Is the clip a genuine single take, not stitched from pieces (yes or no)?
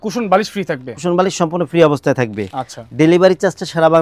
yes